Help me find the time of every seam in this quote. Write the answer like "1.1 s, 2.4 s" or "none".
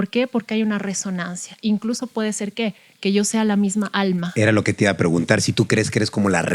none